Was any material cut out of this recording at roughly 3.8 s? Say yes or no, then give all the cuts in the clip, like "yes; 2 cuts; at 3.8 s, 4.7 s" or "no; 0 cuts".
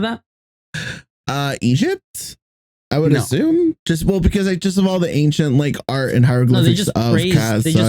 yes; 1 cut; at 3.8 s